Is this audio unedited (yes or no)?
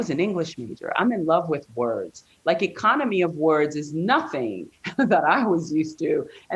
yes